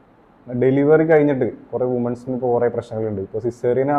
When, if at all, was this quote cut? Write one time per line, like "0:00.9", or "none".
none